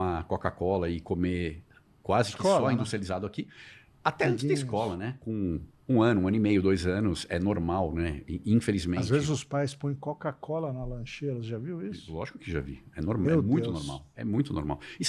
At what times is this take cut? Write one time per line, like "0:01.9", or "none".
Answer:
none